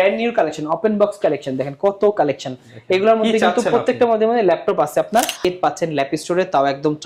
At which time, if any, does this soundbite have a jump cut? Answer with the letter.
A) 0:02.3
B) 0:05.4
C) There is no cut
B